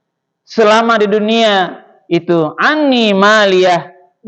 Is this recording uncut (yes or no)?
yes